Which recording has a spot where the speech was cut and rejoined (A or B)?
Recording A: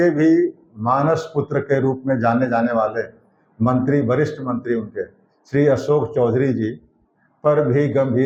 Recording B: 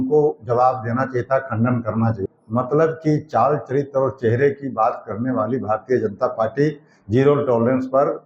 B